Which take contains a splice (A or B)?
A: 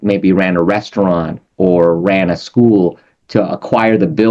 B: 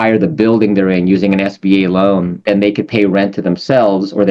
B